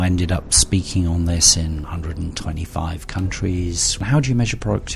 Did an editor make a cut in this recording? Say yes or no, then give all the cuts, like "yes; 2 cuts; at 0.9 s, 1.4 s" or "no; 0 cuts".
yes; 2 cuts; at 1.8 s, 4.0 s